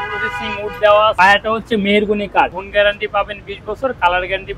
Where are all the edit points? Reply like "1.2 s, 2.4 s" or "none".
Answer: 1.1 s, 2.6 s